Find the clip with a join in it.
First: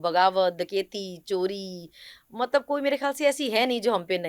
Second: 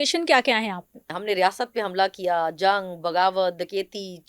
second; 1 cut; at 1.2 s

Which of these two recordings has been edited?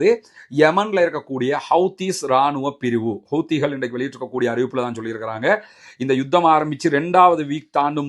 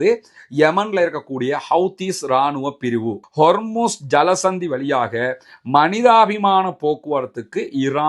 second; 1 cut; at 3.2 s

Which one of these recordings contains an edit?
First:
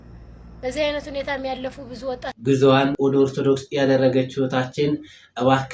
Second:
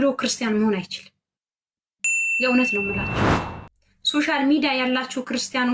first; 2 cuts; at 2.3 s, 2.9 s

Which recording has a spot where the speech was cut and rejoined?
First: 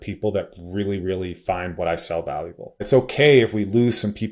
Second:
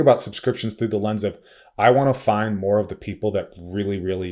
first; 1 cut; at 2.8 s

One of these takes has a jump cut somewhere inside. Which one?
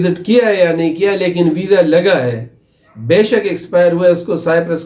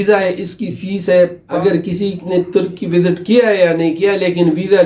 second; 1 cut; at 1.4 s

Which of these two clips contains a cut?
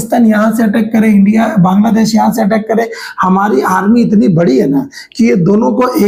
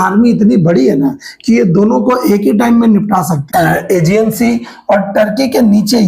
second; 1 cut; at 3.5 s

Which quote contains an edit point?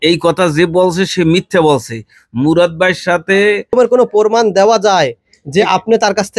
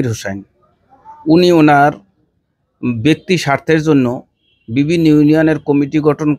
first; 1 cut; at 3.7 s

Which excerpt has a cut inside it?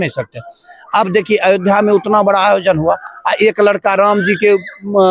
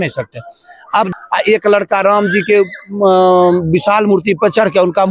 second; 1 cut; at 1.1 s

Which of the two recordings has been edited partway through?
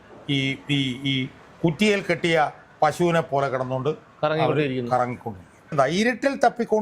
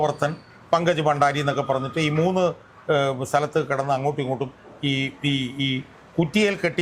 first; 1 cut; at 5.7 s

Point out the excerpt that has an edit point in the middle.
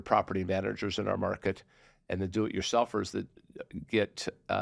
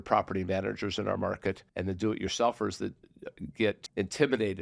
second; 2 cuts; at 1.7 s, 3.8 s

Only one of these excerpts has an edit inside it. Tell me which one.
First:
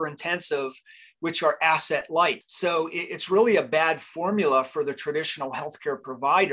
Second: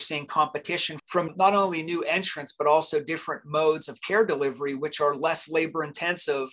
second; 1 cut; at 1.3 s

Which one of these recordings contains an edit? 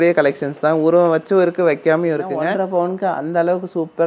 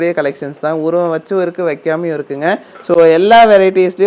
first; 1 cut; at 2.4 s

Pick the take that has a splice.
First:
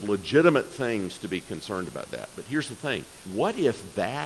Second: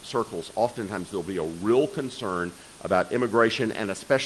first; 1 cut; at 3.2 s

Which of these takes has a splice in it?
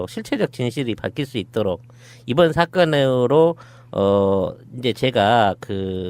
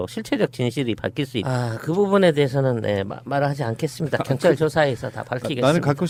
first; 1 cut; at 1.5 s

